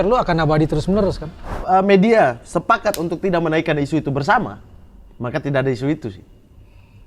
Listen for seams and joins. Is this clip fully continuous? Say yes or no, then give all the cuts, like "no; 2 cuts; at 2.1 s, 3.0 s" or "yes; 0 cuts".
no; 1 cut; at 1.5 s